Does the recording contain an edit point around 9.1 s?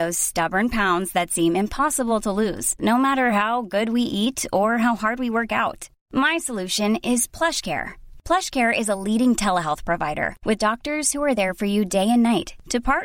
no; 0 cuts

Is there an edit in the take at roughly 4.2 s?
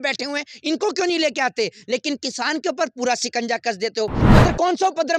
yes; 1 cut; at 4.2 s

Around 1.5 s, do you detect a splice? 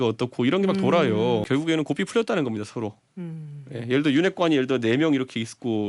yes; 1 cut; at 1.5 s

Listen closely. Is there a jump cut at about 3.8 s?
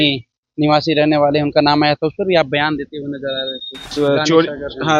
yes; 1 cut; at 3.8 s

